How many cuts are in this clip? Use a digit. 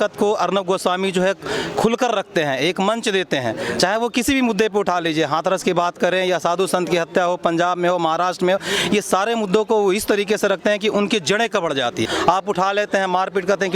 1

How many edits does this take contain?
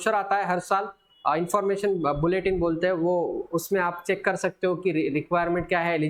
0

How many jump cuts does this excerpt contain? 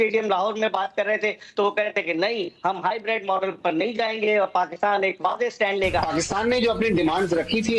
1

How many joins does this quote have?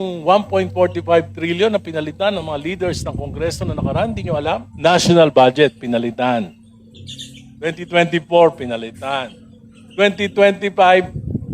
1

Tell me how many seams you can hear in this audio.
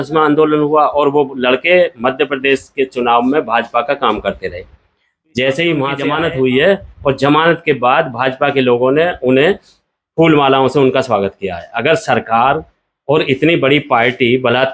1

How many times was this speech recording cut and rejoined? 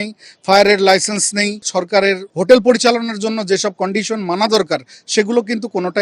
1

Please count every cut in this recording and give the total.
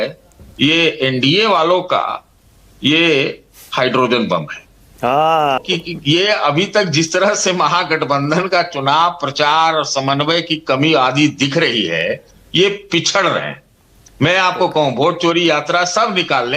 1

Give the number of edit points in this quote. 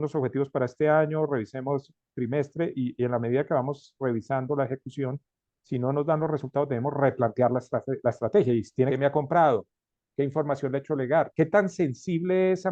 1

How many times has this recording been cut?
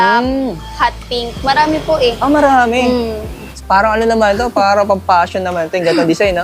1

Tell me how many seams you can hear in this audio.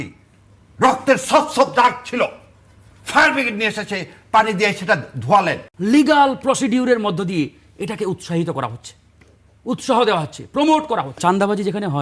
2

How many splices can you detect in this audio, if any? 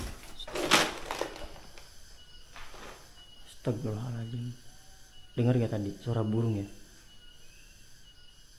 0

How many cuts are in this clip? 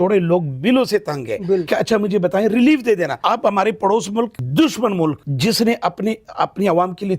4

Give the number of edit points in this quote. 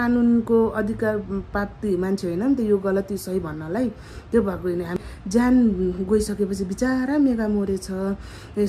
1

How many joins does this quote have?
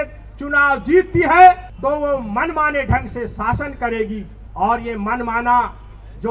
2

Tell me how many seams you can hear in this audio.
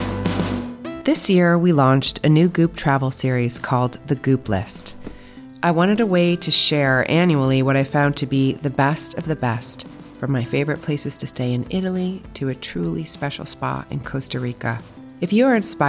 1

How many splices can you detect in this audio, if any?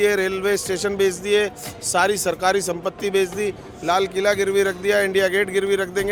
0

